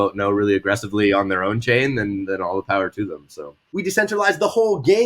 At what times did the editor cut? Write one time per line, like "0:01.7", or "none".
0:03.6